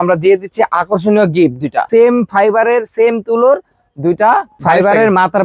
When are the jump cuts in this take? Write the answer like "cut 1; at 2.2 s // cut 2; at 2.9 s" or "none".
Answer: cut 1; at 1.9 s // cut 2; at 4.6 s